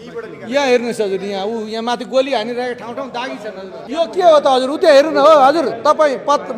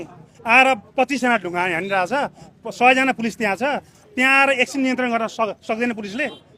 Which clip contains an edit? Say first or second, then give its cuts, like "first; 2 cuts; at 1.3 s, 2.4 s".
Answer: first; 1 cut; at 3.8 s